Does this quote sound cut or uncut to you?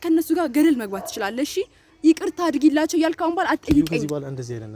uncut